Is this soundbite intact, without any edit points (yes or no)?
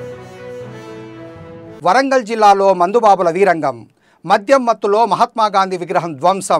no